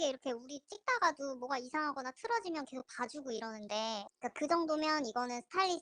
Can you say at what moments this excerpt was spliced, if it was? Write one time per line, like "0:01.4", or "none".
0:04.2